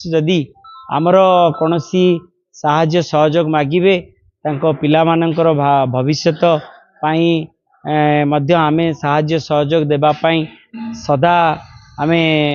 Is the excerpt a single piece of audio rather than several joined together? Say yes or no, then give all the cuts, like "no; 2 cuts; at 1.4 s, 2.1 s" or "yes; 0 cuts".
yes; 0 cuts